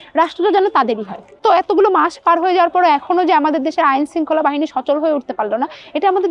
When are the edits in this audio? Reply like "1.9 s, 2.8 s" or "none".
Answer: 1.4 s